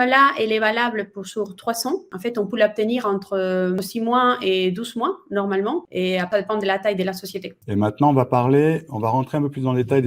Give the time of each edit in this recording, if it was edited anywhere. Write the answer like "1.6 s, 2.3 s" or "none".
2.1 s, 3.8 s, 6.2 s, 7.5 s